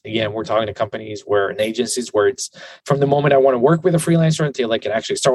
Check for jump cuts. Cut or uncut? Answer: uncut